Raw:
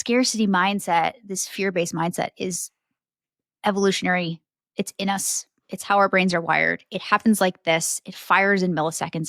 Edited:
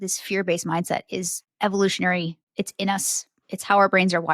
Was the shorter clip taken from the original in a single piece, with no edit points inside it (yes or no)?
no